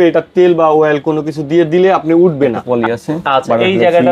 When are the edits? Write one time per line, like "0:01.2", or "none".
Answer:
0:02.6

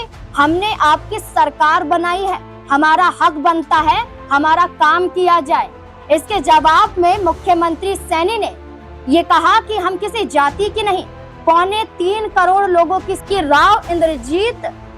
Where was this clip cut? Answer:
0:13.1

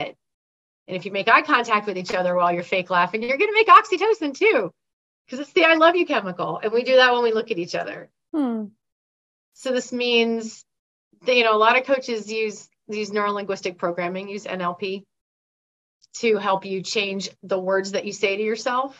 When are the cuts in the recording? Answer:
none

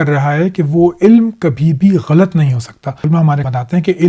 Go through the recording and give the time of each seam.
0:03.1

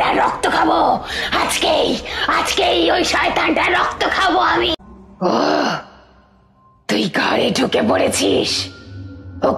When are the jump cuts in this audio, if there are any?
0:04.7

